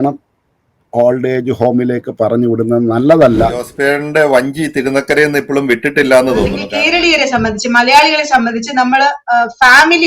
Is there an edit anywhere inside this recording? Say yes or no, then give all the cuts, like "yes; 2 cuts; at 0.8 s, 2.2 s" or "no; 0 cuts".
yes; 2 cuts; at 3.7 s, 6.6 s